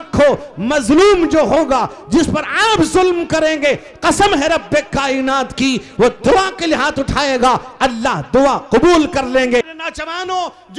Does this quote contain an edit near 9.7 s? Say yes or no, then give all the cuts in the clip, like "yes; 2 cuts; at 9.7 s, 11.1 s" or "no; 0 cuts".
yes; 1 cut; at 9.7 s